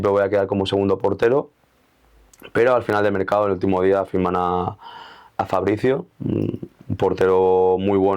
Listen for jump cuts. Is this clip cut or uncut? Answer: uncut